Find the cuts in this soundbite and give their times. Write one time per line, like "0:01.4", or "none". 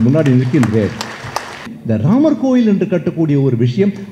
0:01.7